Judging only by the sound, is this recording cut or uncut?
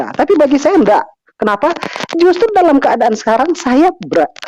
uncut